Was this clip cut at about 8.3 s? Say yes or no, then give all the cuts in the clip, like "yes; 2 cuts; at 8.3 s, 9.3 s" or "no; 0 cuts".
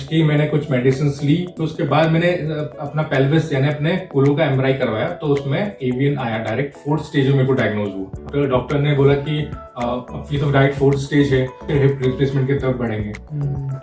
yes; 3 cuts; at 1.6 s, 8.3 s, 11.6 s